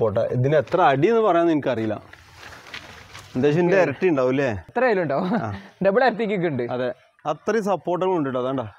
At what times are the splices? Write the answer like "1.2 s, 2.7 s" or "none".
4.6 s